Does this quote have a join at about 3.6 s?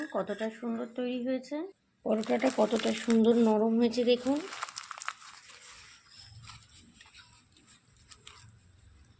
no; 1 cut; at 1.8 s

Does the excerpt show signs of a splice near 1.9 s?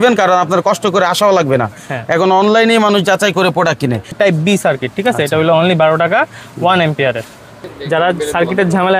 no; 2 cuts; at 4.1 s, 7.5 s

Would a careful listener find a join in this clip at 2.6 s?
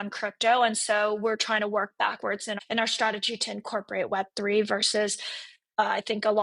yes; 1 cut; at 2.6 s

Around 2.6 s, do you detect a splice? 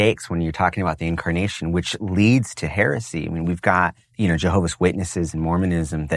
no; 1 cut; at 4.0 s

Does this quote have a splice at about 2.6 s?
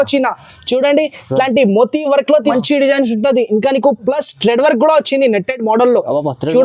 yes; 1 cut; at 2.6 s

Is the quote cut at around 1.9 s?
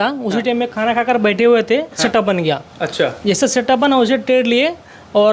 no; 0 cuts

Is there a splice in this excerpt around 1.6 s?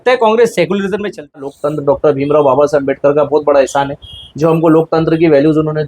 yes; 1 cut; at 1.6 s

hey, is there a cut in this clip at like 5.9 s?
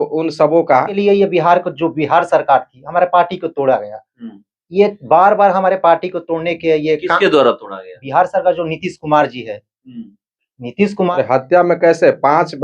no; 2 cuts; at 0.9 s, 11.1 s

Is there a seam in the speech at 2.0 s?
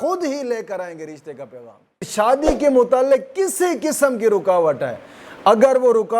yes; 1 cut; at 2.0 s

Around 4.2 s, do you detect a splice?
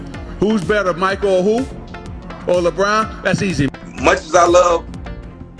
yes; 1 cut; at 4.2 s

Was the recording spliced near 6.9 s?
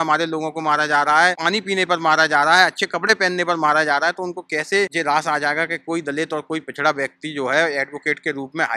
no; 2 cuts; at 1.4 s, 4.9 s

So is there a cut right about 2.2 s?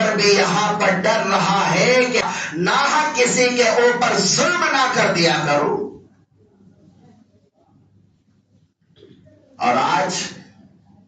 yes; 1 cut; at 2.2 s

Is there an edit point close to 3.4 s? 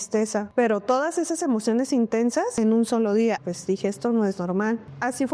yes; 2 cuts; at 2.5 s, 3.4 s

